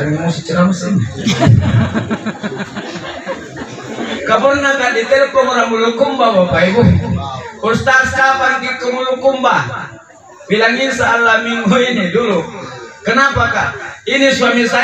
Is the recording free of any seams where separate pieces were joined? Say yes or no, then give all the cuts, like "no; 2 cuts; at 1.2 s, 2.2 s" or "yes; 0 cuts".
no; 1 cut; at 4.2 s